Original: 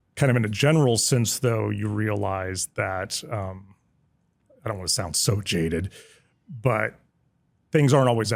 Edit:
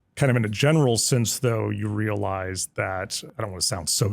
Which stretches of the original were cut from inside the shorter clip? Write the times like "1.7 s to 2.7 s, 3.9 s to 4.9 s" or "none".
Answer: 3.2 s to 4.4 s